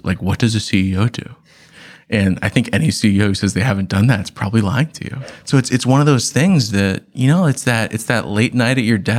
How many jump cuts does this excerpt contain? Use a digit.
1